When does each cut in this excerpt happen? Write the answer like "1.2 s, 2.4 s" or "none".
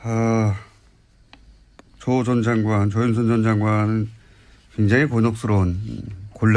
3.1 s